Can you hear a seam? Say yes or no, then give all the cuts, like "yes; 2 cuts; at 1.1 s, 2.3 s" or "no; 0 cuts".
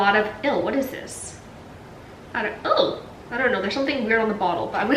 no; 0 cuts